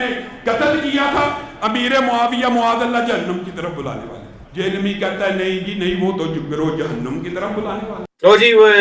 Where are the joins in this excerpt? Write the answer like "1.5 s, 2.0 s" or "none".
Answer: none